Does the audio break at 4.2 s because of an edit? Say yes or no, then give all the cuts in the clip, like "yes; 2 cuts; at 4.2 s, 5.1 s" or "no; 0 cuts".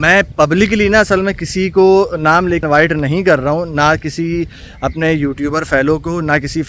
no; 1 cut; at 2.6 s